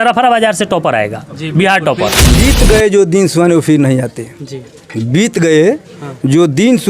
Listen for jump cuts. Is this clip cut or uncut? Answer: cut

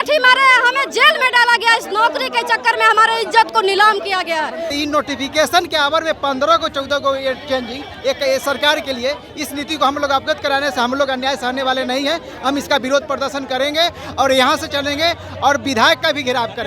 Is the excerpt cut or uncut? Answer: cut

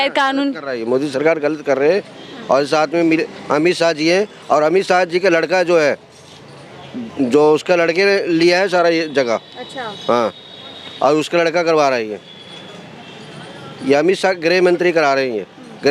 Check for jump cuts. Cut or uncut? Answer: uncut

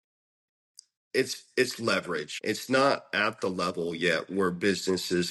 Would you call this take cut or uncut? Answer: cut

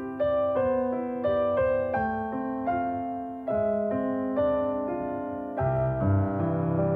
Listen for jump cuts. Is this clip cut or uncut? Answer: uncut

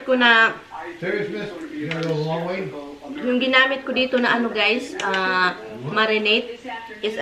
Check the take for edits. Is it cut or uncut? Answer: uncut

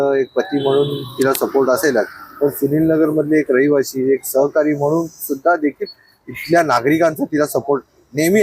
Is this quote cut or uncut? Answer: uncut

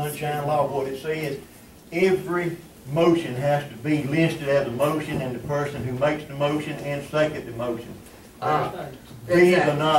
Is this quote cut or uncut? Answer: uncut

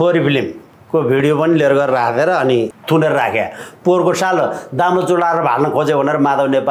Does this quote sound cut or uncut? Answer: cut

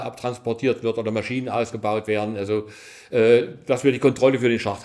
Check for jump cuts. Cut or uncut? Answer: uncut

